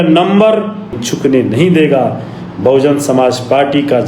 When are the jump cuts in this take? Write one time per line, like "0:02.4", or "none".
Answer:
0:01.1